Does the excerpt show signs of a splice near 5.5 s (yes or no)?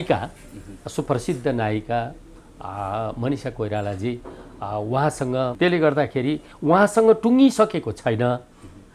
yes